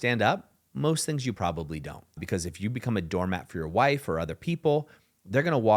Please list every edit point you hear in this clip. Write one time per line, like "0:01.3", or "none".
0:02.2